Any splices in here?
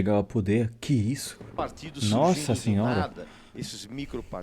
yes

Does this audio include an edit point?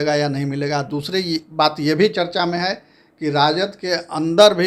no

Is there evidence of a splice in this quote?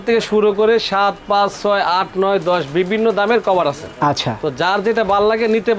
no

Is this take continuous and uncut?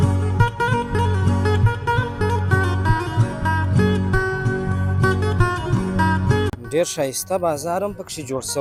yes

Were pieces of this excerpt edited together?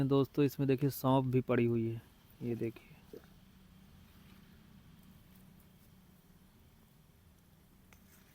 no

